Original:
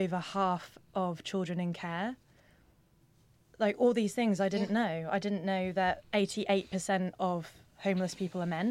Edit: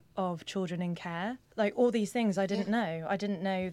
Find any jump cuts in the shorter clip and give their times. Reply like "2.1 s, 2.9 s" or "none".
1.4 s